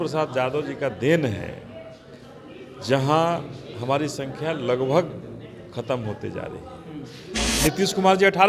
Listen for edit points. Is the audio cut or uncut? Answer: cut